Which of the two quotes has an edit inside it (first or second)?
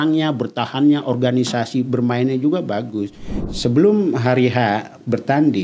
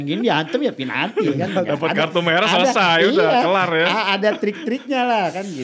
first